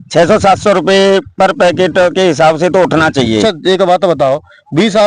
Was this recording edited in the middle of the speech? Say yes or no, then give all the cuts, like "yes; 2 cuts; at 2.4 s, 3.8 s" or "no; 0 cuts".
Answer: yes; 1 cut; at 3.4 s